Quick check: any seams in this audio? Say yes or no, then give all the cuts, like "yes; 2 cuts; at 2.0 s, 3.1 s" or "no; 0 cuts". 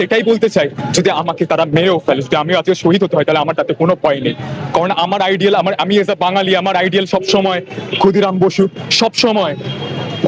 no; 0 cuts